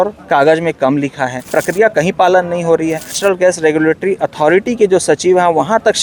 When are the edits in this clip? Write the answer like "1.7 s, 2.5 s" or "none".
1.4 s, 3.2 s

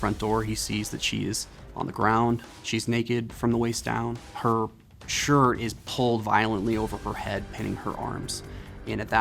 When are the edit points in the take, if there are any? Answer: 2.5 s, 4.3 s

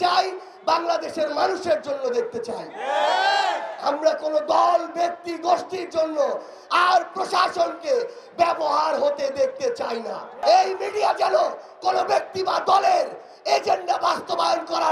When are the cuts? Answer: 10.4 s

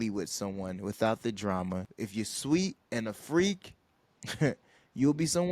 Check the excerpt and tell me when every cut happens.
2.0 s

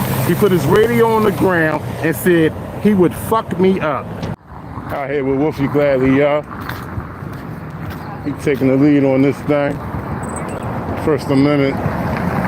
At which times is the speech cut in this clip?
4.5 s

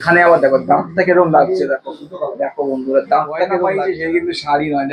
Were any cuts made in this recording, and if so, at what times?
3.7 s

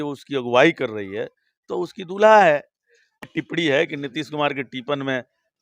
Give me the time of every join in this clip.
3.2 s

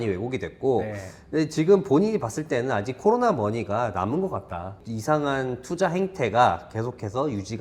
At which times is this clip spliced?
4.8 s

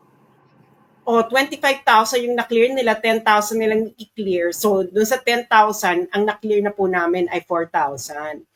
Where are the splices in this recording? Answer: none

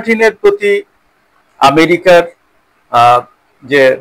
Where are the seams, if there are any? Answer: none

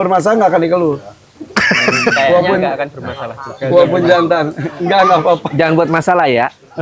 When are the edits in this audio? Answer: none

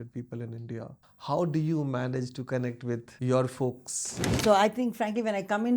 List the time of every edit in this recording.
1.1 s, 3.1 s, 4.3 s

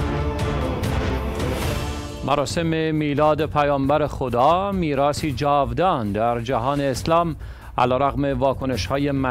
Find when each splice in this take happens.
1.1 s

